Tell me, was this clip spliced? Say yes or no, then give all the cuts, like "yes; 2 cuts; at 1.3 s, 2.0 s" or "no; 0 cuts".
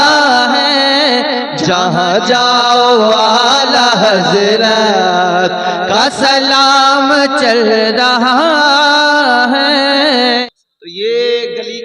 yes; 1 cut; at 10.4 s